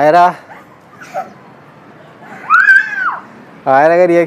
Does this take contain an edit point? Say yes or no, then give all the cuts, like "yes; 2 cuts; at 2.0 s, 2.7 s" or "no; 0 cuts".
no; 0 cuts